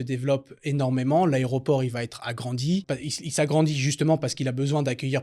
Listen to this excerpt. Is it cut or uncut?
cut